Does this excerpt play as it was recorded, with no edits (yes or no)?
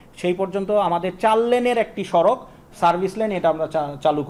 yes